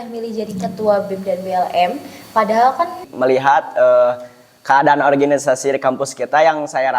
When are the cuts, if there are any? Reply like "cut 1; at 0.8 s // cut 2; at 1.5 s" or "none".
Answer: cut 1; at 3.1 s

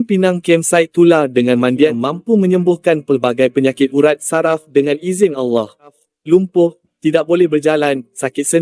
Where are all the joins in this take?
cut 1; at 2.0 s // cut 2; at 6.1 s

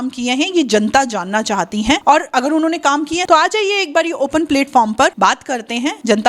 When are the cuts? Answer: cut 1; at 3.2 s

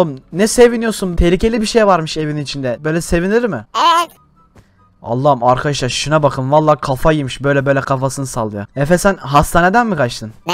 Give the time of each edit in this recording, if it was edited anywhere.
none

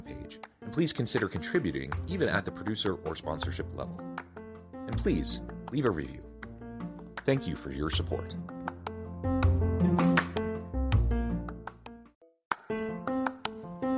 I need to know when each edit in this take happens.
cut 1; at 12.1 s

